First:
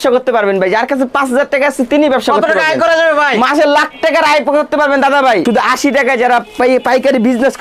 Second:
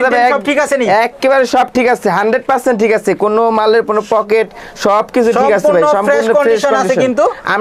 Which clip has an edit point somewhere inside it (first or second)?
first